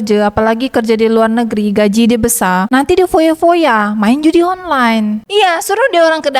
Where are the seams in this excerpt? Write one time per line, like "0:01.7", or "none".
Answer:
0:05.3